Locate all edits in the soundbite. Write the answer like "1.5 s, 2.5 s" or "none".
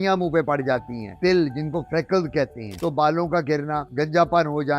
1.1 s, 2.8 s